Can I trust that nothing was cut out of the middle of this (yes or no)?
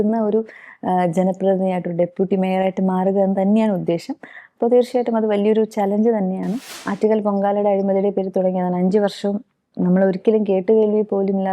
no